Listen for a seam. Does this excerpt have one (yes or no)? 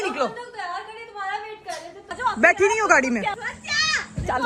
yes